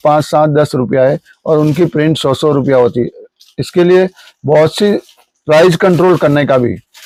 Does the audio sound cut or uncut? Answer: uncut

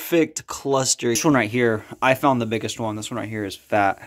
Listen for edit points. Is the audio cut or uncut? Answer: cut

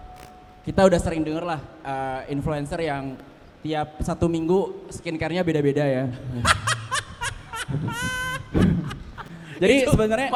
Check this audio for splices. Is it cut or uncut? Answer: uncut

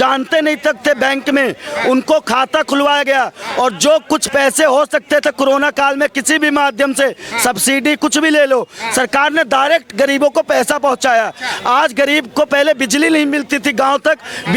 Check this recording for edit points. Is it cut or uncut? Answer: uncut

